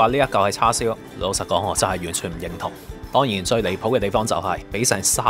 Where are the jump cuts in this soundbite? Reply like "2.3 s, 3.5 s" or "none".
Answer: 3.0 s